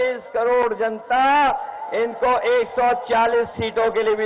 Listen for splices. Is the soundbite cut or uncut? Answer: uncut